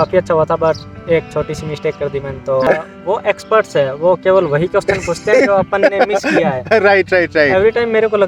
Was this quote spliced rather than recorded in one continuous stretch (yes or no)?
yes